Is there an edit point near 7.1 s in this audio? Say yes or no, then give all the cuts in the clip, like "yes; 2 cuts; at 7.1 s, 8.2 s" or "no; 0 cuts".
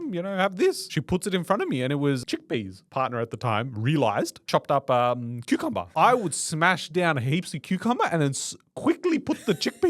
no; 4 cuts; at 0.9 s, 2.2 s, 4.4 s, 5.9 s